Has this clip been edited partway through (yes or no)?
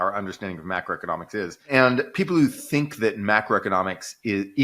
yes